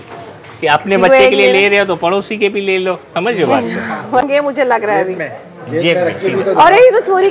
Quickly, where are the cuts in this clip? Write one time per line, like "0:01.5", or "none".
0:04.3